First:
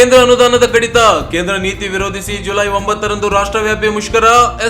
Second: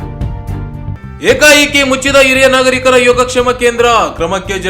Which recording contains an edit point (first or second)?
second